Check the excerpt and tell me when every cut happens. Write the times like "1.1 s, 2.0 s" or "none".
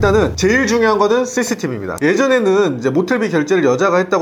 2.0 s